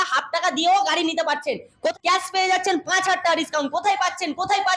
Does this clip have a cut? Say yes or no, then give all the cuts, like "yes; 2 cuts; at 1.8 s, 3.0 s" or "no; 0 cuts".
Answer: yes; 1 cut; at 1.9 s